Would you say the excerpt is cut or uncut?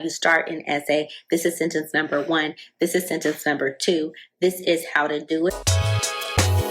cut